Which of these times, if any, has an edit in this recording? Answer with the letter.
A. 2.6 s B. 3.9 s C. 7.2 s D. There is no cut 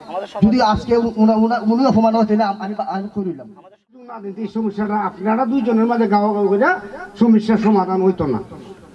B